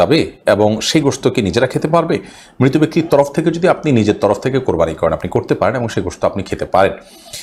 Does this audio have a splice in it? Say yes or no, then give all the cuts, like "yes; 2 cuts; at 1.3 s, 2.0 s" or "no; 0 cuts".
no; 0 cuts